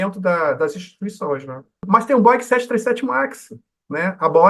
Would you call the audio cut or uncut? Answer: cut